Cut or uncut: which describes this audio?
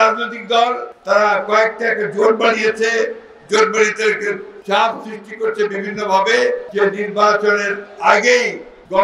uncut